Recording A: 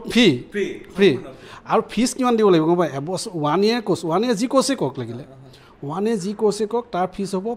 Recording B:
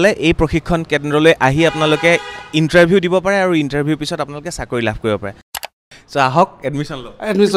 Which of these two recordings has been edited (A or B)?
B